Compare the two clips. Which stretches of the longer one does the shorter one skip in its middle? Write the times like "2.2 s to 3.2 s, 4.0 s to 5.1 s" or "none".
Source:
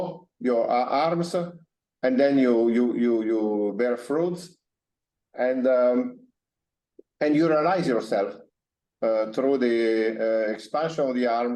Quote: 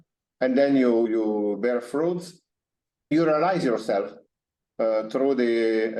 2.7 s to 3.2 s, 5.3 s to 7.3 s